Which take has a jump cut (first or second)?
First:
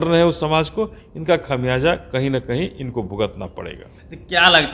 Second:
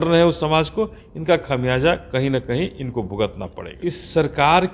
second